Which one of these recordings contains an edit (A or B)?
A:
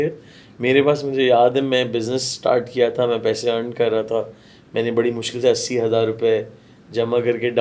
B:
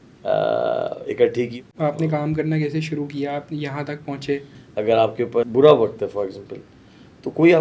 B